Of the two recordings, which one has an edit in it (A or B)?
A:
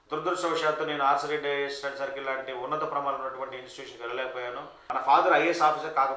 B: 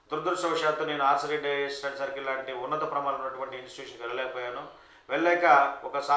A